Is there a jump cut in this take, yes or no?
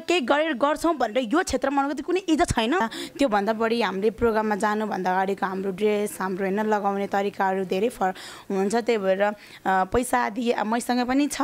yes